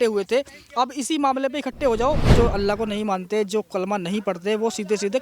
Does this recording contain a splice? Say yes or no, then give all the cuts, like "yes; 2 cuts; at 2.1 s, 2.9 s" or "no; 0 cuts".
yes; 1 cut; at 2.3 s